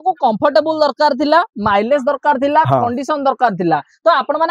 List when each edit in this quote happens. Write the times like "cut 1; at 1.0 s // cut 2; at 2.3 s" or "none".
none